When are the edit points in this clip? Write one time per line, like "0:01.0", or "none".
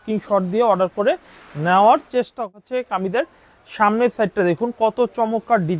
0:02.3

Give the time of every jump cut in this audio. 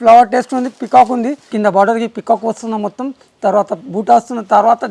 0:01.4

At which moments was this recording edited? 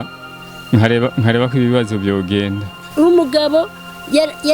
0:02.9

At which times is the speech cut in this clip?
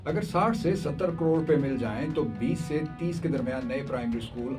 none

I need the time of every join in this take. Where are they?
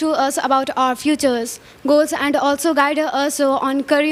none

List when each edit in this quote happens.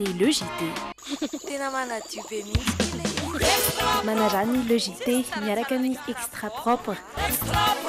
none

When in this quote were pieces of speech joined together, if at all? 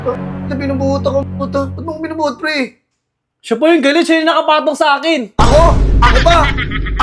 none

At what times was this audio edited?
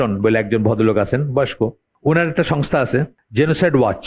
0:01.9
0:03.2

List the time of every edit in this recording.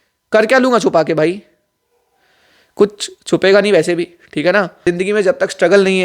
0:04.8

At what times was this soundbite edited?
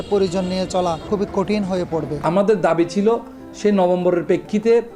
0:01.1
0:02.2

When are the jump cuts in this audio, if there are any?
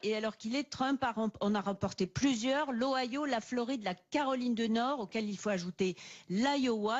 0:02.2

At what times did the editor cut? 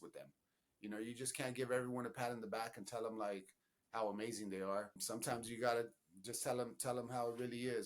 0:05.0

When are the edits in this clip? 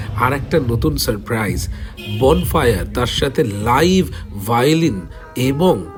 none

